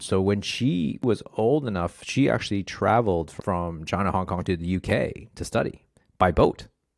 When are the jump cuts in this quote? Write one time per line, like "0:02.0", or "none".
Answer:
0:03.3
0:04.4

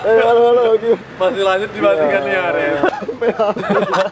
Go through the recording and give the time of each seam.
0:02.9

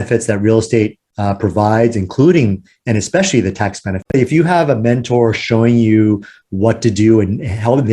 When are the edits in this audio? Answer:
0:04.1

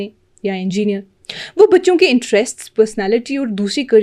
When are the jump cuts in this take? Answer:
none

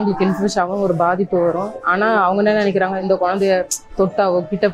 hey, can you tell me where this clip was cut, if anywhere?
0:01.8
0:03.0

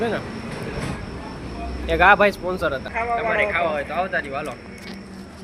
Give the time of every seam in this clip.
0:02.9

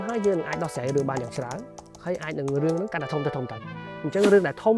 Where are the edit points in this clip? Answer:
none

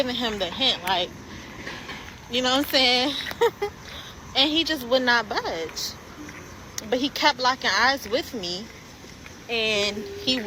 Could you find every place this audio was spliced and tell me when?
none

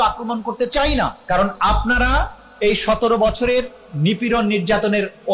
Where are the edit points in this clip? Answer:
0:01.2

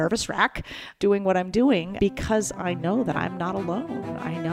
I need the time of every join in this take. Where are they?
0:00.9
0:01.9

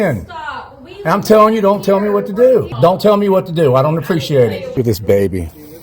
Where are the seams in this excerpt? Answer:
0:02.7
0:04.8

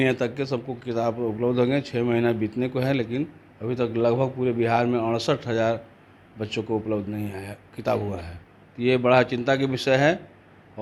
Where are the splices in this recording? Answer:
none

